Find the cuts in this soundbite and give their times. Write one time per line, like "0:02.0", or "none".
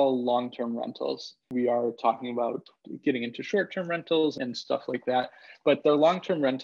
0:01.5
0:04.4